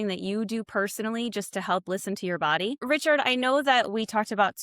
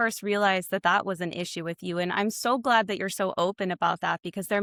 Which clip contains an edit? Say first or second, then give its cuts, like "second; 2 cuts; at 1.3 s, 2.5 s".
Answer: first; 1 cut; at 2.8 s